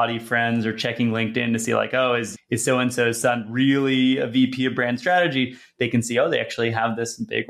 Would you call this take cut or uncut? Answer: cut